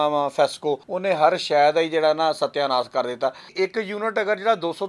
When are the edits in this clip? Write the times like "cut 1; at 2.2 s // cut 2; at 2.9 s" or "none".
cut 1; at 0.9 s // cut 2; at 3.4 s